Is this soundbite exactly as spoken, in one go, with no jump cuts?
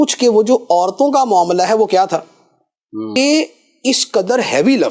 no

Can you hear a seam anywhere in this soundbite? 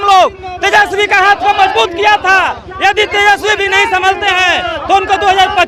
no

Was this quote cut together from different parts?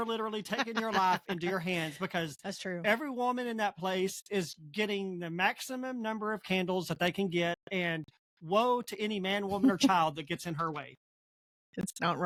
no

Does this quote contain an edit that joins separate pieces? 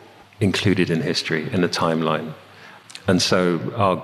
no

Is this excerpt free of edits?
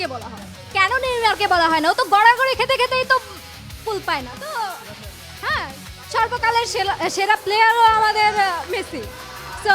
yes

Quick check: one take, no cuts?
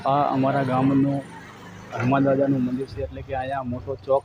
yes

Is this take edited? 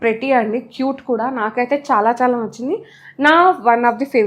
no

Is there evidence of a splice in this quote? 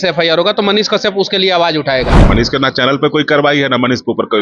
yes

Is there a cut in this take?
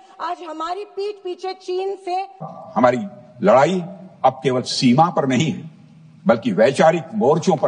yes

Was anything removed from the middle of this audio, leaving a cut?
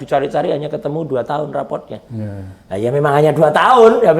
no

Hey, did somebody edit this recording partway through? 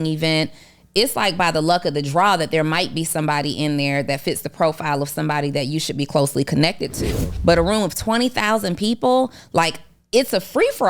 yes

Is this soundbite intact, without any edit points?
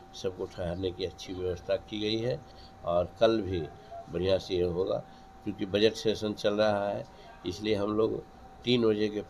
yes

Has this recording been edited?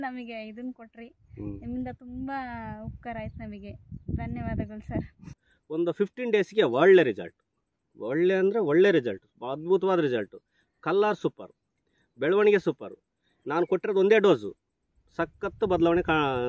yes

